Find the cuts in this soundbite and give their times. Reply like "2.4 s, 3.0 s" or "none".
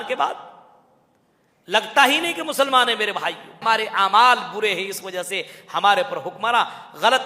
3.6 s